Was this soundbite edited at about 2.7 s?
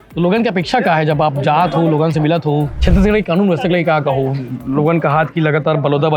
yes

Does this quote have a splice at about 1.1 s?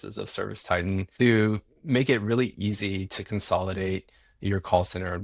yes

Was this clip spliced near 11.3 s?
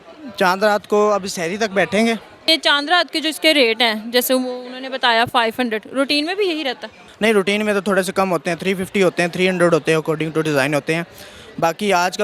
no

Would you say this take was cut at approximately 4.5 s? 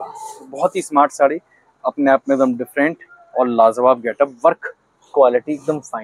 no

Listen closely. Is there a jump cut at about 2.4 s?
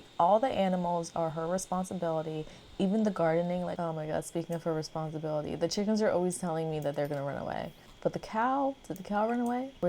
no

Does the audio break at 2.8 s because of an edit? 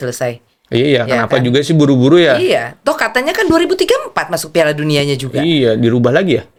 no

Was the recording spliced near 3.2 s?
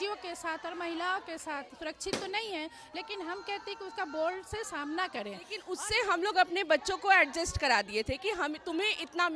no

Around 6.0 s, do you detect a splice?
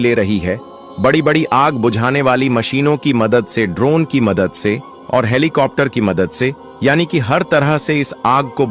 no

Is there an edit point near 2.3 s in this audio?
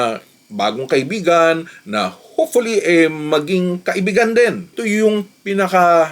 no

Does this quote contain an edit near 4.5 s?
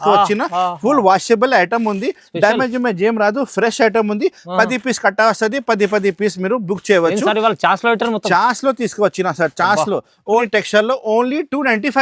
no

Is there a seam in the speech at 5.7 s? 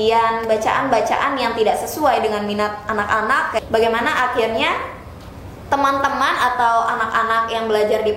no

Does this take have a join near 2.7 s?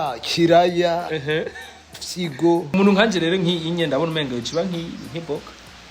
yes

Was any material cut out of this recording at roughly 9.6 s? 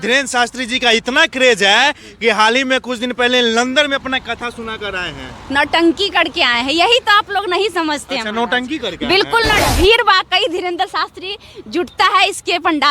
yes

